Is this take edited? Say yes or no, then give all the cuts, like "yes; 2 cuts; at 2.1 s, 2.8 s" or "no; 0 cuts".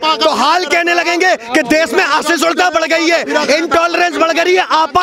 no; 0 cuts